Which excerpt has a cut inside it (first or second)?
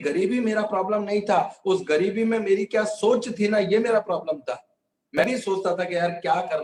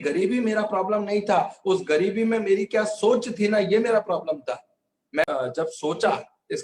second